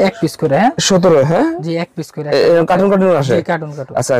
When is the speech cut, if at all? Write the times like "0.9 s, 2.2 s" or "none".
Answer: none